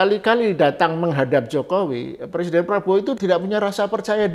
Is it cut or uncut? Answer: cut